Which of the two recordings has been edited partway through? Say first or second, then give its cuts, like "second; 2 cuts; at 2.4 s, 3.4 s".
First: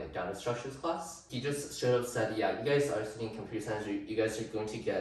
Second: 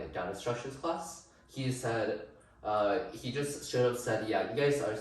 first; 1 cut; at 1.3 s